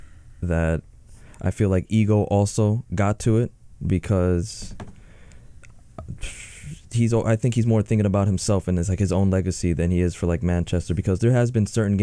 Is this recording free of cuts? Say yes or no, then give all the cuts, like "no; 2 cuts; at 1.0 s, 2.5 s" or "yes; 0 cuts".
yes; 0 cuts